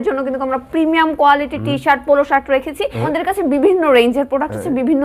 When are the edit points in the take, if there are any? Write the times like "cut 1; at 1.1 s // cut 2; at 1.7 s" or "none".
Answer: cut 1; at 3.0 s